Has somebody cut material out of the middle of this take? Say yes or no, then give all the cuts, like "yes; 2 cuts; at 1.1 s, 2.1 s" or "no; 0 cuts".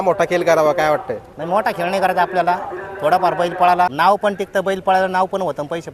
yes; 1 cut; at 3.9 s